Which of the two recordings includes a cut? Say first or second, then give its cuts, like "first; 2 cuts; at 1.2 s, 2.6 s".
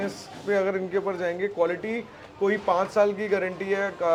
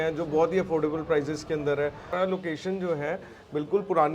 second; 1 cut; at 2.1 s